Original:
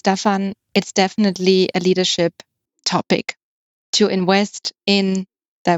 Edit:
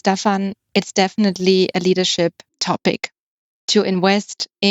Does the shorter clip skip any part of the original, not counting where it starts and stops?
yes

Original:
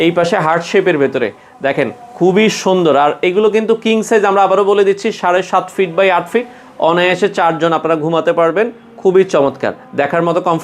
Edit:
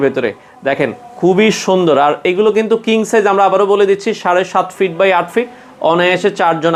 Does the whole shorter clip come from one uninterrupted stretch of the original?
yes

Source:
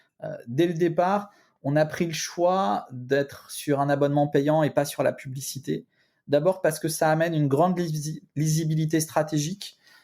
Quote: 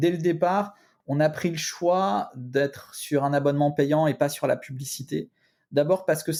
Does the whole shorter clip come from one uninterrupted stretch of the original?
yes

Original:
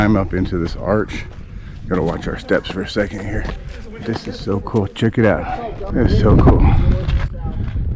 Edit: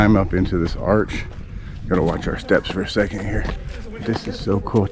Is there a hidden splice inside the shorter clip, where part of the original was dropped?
no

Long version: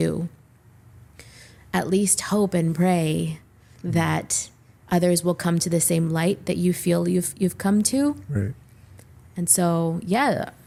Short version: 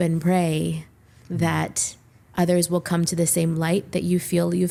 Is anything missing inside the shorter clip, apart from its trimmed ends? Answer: no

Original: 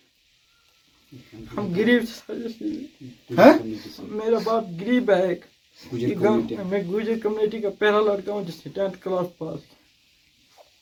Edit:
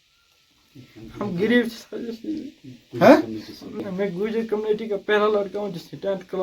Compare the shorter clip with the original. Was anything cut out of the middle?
yes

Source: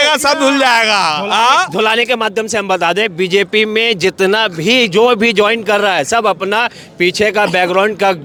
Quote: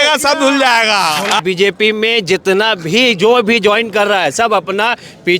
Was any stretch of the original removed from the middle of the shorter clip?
yes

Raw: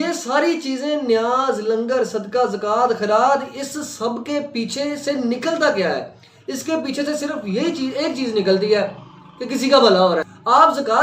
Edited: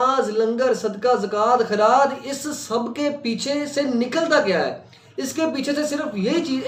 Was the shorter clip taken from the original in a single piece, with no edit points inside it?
yes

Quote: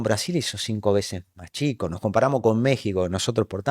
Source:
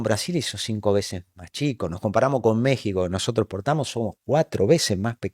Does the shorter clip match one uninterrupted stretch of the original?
yes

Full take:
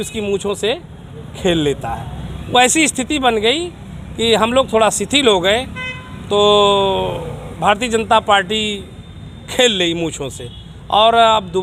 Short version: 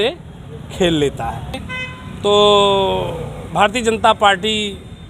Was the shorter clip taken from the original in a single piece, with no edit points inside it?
no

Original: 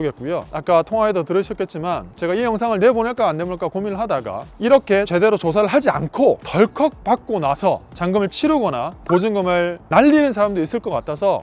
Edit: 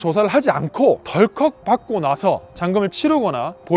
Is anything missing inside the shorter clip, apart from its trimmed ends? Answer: no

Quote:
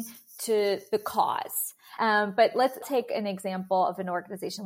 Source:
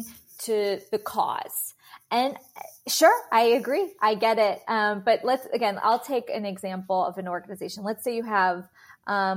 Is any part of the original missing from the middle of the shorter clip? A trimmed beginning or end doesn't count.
yes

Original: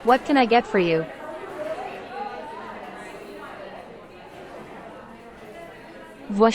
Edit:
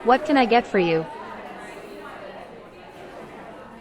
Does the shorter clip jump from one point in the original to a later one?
yes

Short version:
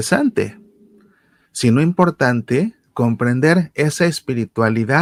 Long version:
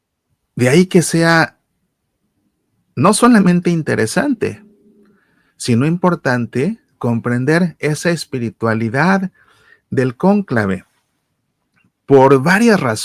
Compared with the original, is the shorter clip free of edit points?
yes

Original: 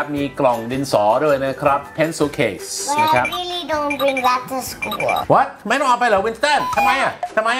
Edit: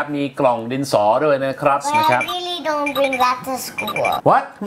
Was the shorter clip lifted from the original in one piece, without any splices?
no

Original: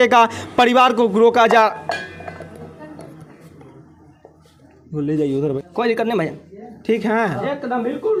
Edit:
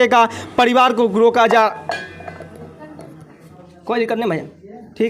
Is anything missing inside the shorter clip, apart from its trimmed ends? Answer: yes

